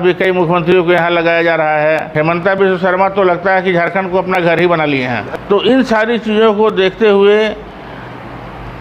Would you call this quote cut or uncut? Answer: cut